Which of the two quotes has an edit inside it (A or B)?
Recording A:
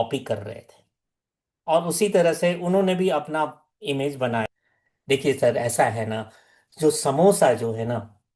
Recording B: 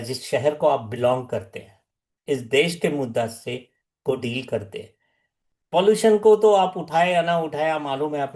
A